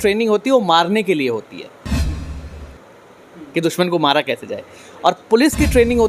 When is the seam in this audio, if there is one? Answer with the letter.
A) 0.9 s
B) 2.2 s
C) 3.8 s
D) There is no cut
D